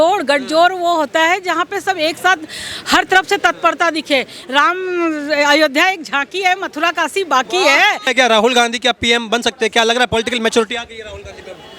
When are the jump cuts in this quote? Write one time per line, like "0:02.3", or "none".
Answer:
0:04.4
0:08.1

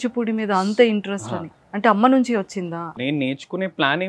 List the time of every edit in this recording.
0:03.0

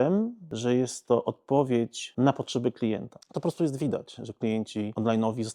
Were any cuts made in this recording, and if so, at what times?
0:03.2

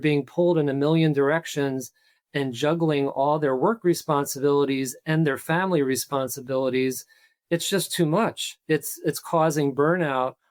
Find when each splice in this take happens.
none

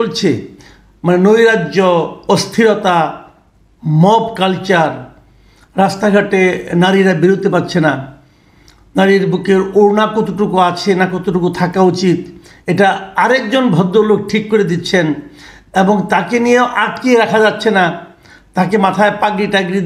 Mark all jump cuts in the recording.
none

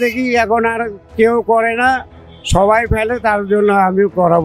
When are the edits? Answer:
none

